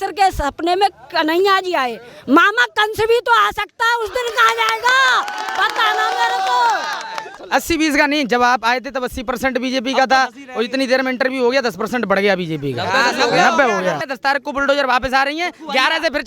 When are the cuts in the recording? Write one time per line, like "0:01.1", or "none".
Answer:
0:07.2
0:14.0